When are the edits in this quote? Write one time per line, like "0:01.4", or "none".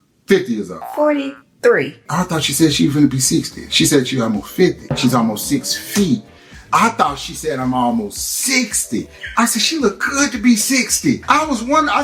none